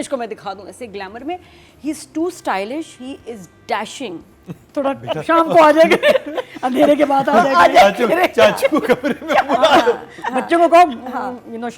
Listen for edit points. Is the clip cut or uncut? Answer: cut